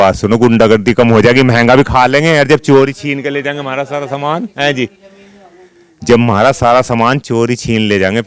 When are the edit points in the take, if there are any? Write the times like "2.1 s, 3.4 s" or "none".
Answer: none